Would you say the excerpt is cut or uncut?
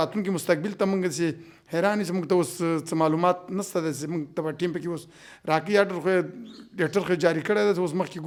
uncut